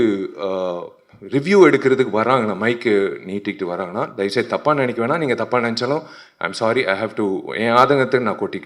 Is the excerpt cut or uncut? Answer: uncut